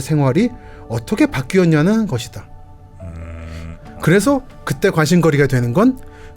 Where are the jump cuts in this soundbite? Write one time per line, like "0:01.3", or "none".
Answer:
0:03.6